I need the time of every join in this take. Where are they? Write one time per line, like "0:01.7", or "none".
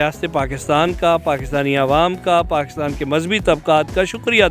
none